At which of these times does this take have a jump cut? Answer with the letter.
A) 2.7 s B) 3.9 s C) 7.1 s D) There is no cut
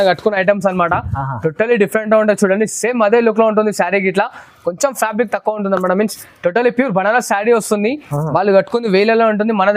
D